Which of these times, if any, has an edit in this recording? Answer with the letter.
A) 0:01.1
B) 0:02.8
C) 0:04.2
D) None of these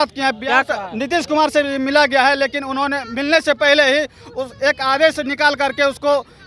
D